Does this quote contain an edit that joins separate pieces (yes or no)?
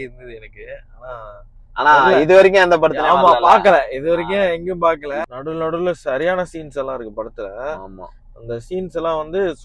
yes